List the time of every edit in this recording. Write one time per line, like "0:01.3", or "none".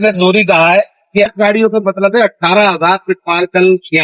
0:01.3